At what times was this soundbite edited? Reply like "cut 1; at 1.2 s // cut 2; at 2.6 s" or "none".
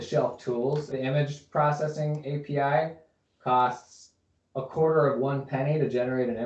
cut 1; at 0.9 s